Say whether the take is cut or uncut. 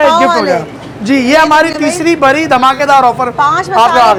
uncut